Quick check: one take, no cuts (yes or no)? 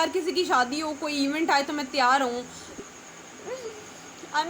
no